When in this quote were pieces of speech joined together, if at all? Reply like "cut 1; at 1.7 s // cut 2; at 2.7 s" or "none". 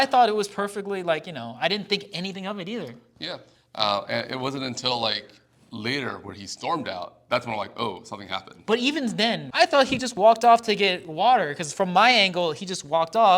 cut 1; at 9.5 s